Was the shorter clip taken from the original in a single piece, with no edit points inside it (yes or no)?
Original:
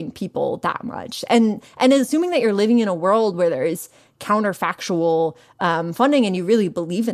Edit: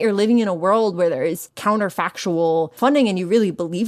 no